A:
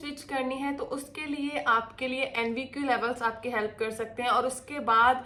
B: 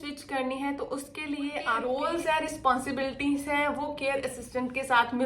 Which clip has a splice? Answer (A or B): B